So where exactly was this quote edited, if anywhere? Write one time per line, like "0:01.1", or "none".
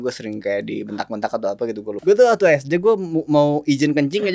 0:02.0